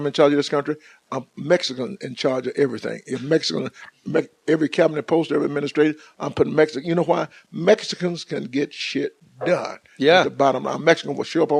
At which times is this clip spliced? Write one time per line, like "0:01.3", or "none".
none